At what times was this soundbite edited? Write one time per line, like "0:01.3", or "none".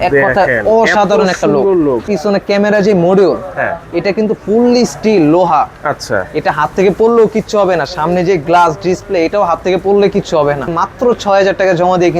0:02.1
0:10.7